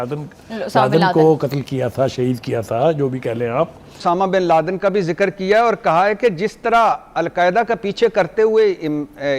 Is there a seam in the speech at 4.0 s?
yes; 1 cut; at 4.0 s

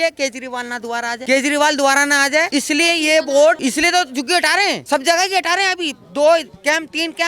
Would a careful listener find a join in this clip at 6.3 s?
no; 4 cuts; at 1.2 s, 2.5 s, 3.6 s, 4.8 s

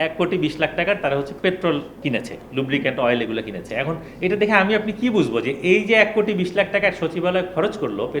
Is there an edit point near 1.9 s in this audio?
yes; 1 cut; at 1.9 s

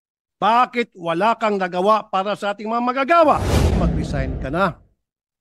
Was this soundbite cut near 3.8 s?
yes; 1 cut; at 3.8 s

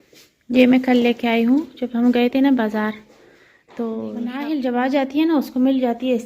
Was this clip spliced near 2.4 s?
no; 1 cut; at 4.1 s

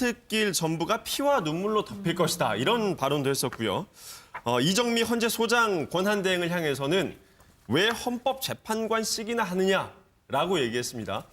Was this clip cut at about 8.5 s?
yes; 1 cut; at 8.5 s

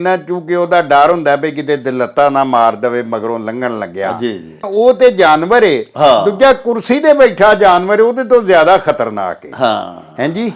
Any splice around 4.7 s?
yes; 1 cut; at 4.7 s

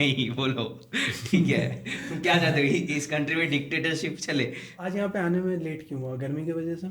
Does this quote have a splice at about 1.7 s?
no; 1 cut; at 4.8 s

